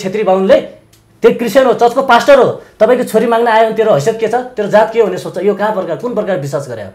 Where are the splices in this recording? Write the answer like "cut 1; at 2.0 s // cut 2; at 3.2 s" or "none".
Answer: none